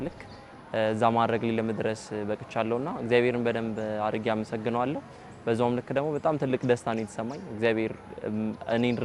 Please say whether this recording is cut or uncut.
uncut